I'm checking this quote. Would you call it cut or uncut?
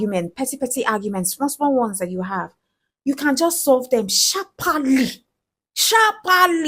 uncut